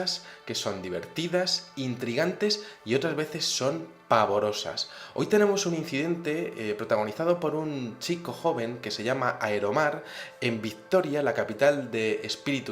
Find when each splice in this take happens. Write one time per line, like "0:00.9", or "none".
0:08.3